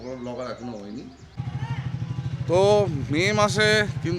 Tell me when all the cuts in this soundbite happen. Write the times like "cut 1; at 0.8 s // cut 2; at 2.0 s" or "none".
cut 1; at 1.2 s